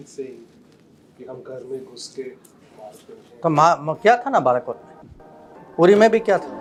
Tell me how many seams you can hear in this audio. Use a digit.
0